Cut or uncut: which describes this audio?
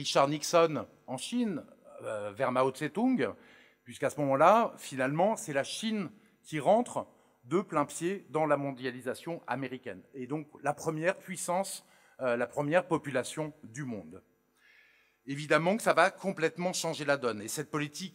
uncut